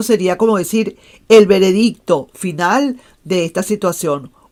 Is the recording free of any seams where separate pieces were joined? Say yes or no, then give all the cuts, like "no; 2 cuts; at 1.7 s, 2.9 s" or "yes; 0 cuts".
yes; 0 cuts